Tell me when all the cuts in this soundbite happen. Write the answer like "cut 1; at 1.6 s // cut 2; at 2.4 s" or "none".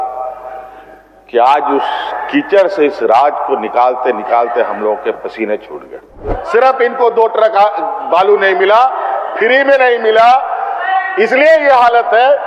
cut 1; at 6.3 s